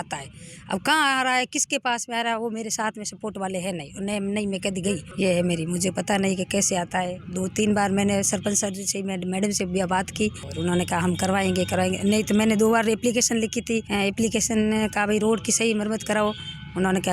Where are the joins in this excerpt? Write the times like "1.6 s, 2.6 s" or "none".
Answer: none